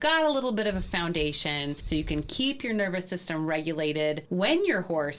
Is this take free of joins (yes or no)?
no